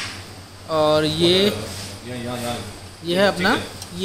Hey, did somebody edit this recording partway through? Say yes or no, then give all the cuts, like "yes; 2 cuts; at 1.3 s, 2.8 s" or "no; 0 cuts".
no; 0 cuts